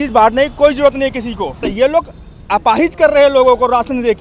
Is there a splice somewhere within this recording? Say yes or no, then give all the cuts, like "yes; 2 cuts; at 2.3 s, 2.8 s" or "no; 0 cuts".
yes; 1 cut; at 1.6 s